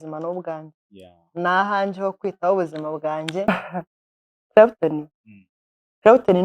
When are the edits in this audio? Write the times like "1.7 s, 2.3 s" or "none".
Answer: 3.5 s